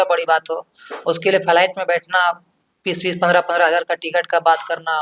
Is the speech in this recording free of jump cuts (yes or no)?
yes